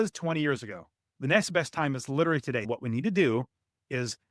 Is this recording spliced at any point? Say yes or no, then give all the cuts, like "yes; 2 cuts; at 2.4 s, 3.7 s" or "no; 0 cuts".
yes; 1 cut; at 2.7 s